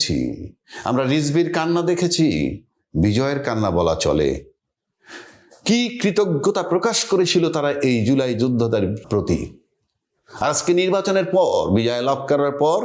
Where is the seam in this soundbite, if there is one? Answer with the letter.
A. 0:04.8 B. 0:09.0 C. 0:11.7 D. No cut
B